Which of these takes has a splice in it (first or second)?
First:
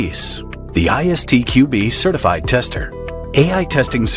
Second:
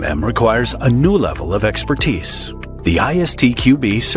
first